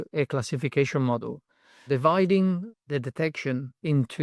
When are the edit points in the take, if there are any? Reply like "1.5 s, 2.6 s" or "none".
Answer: 1.8 s, 2.7 s